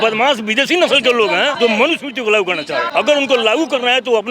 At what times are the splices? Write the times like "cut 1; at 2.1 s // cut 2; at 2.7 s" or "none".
cut 1; at 1.5 s // cut 2; at 2.9 s